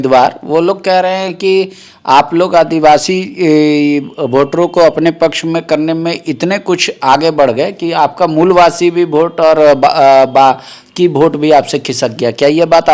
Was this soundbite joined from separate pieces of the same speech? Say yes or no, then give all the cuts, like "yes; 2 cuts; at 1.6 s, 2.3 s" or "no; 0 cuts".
no; 0 cuts